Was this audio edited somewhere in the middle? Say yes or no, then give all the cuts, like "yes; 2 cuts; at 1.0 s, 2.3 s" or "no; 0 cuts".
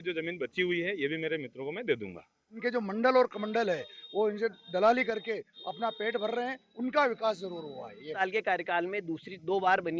yes; 2 cuts; at 2.6 s, 8.2 s